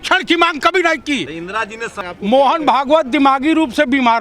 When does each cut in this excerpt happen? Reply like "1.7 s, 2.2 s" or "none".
2.0 s

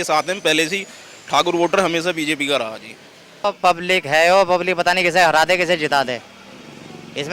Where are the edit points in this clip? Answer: 3.4 s

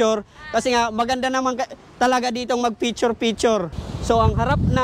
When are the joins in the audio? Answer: 3.7 s

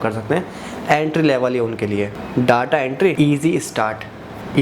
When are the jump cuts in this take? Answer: 2.2 s, 3.1 s

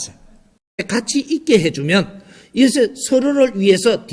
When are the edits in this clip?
0.9 s

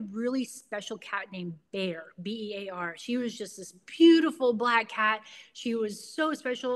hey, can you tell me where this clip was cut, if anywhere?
none

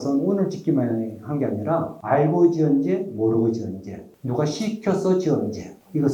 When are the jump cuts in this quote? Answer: none

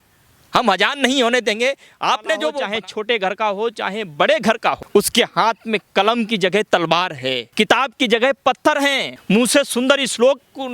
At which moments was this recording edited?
2.5 s, 4.8 s, 7.5 s, 9.1 s

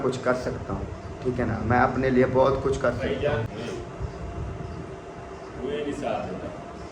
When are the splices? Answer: 3.5 s

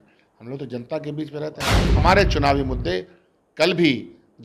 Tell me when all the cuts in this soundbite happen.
1.6 s

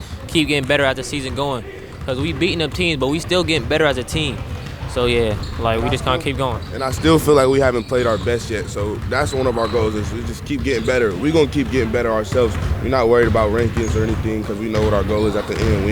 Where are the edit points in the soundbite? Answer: none

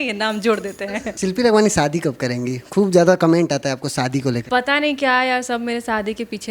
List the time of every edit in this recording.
1.1 s, 4.4 s

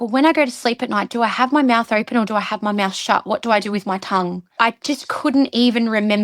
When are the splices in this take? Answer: 4.6 s

